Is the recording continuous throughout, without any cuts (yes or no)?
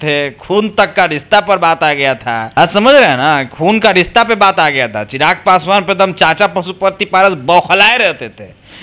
no